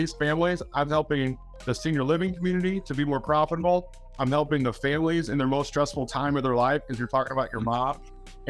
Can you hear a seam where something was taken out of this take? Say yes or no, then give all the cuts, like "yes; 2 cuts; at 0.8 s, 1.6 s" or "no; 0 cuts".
no; 0 cuts